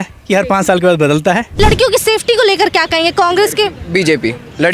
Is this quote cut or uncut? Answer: cut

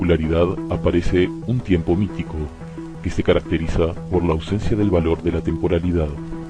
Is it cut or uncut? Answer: uncut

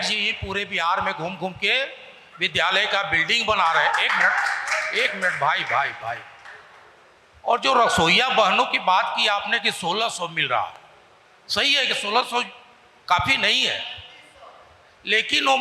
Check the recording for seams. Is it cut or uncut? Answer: uncut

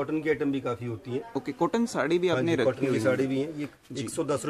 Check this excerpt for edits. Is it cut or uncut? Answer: uncut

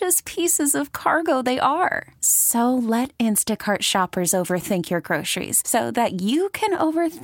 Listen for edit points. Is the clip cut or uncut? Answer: uncut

